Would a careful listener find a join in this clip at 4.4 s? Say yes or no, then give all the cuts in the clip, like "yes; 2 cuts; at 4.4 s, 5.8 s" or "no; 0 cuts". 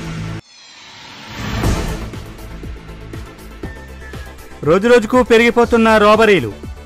yes; 1 cut; at 4.4 s